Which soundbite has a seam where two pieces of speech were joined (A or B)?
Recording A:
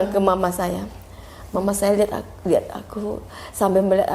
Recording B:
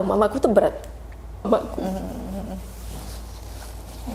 B